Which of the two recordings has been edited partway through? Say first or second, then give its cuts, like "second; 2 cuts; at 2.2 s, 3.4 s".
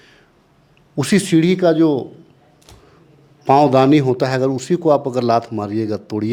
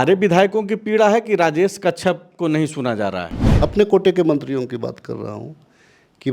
second; 1 cut; at 3.4 s